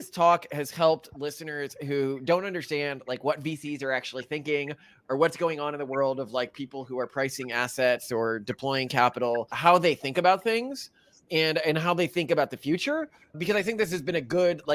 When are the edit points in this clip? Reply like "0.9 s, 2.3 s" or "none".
9.5 s